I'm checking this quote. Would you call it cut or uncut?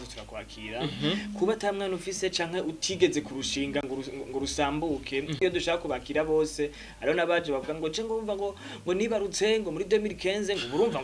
cut